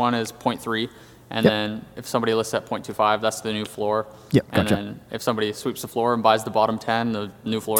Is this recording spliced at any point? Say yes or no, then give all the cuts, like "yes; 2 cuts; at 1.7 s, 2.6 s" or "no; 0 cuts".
no; 0 cuts